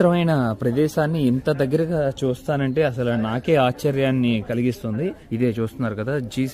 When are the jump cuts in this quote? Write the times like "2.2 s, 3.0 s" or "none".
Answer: 5.2 s